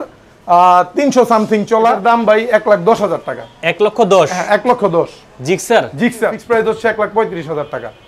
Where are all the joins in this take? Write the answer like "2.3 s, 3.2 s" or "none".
2.0 s, 6.4 s